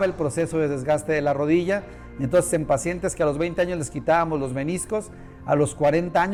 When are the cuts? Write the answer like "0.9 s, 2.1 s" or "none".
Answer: none